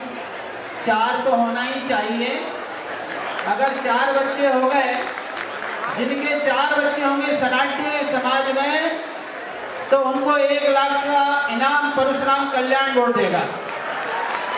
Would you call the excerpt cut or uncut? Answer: uncut